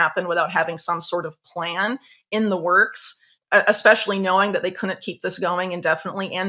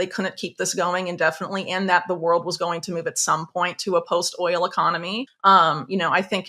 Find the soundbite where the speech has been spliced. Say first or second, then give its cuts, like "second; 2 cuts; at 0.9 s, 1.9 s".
second; 1 cut; at 5.2 s